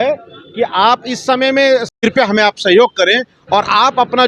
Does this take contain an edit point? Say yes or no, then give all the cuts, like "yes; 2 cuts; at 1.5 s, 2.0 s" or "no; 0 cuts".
yes; 1 cut; at 1.9 s